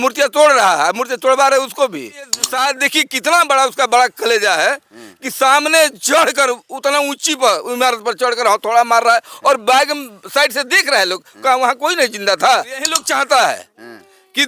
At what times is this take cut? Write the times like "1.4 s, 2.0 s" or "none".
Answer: 2.4 s, 13.0 s